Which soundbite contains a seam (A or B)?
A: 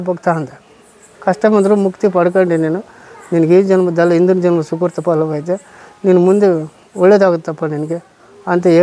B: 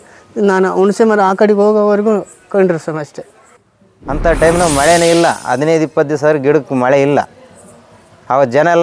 B